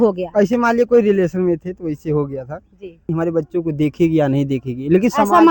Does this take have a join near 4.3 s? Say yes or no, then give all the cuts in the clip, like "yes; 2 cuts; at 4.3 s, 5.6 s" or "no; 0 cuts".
no; 1 cut; at 3.1 s